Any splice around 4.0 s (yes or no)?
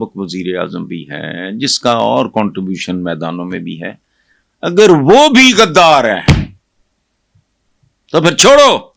no